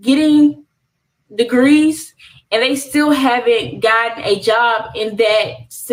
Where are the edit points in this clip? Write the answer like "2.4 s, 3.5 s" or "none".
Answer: none